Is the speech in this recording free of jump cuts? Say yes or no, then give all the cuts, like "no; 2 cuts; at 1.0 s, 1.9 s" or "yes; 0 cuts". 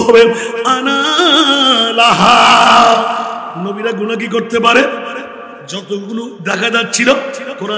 no; 1 cut; at 3.5 s